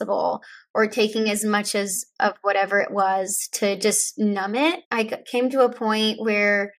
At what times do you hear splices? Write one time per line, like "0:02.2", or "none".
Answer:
0:04.8